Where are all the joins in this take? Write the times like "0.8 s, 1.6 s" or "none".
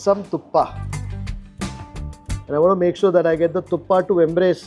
2.3 s